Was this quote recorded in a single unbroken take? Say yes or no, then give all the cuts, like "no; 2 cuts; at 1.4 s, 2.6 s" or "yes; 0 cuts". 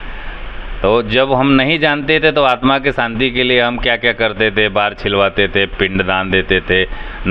yes; 0 cuts